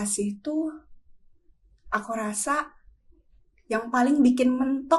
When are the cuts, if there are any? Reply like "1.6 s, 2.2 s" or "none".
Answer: none